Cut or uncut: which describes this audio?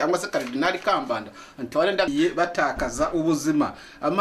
cut